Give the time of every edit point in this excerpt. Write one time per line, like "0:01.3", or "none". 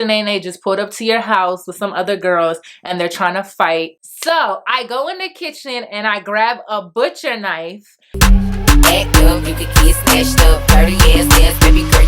0:04.0
0:08.0